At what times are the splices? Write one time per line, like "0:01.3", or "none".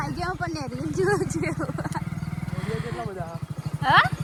none